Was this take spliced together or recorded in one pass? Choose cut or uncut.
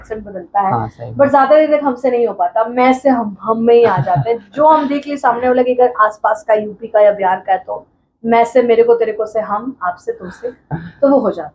uncut